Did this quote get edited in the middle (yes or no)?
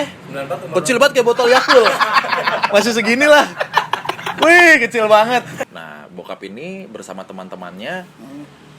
yes